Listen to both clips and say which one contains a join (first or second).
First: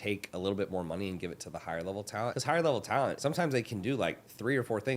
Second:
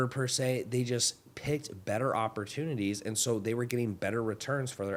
first